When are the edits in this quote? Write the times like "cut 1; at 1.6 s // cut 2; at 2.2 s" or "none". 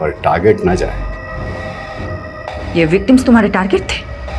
none